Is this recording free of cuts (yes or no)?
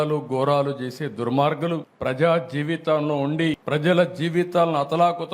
no